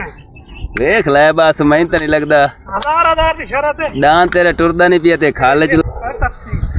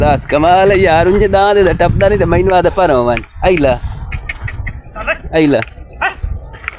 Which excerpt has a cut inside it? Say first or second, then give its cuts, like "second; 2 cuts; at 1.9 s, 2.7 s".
first; 2 cuts; at 4.4 s, 5.8 s